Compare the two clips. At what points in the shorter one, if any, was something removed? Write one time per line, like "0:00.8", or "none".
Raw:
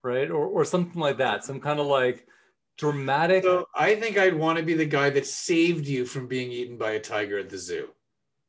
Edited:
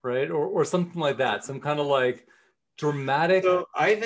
none